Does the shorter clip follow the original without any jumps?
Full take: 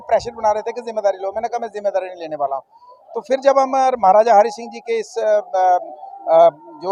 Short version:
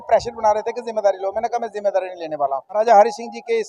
no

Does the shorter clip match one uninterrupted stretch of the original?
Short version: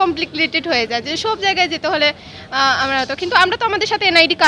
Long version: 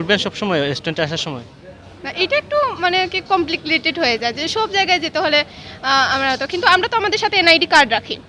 yes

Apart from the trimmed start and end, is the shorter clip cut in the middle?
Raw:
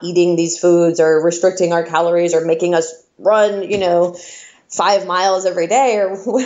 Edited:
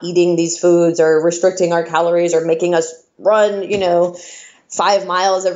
no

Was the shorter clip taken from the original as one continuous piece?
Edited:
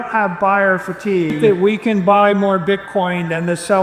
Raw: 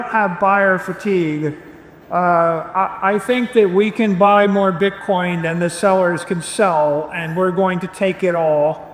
no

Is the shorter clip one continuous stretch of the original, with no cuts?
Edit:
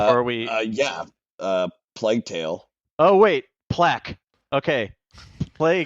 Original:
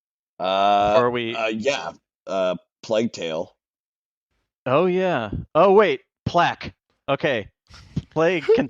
no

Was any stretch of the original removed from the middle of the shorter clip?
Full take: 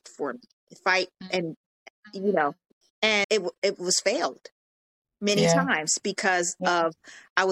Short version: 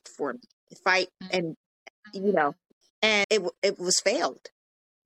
no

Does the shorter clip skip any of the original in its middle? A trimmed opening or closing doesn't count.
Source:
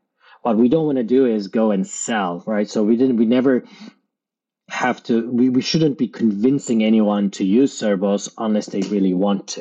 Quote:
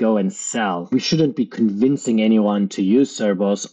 yes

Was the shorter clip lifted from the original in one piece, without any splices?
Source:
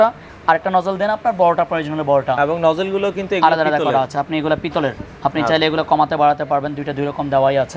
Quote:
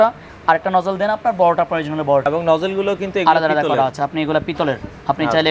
no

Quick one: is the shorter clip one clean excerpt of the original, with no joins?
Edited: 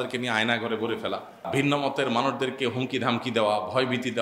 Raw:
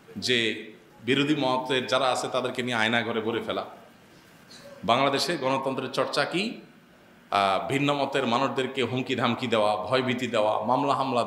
no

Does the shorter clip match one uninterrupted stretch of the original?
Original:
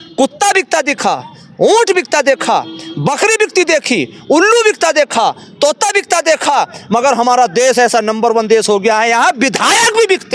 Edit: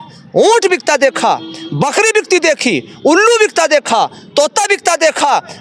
yes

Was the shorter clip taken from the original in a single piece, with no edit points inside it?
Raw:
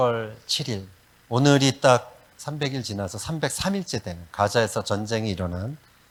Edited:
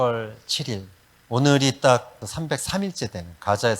no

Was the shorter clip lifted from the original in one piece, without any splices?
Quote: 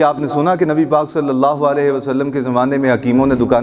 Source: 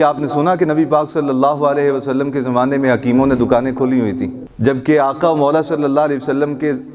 yes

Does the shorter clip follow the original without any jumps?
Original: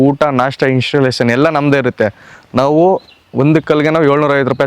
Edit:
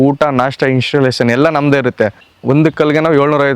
no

